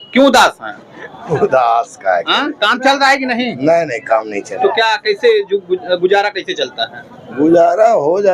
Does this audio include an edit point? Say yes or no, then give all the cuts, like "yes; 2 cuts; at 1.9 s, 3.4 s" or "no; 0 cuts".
no; 0 cuts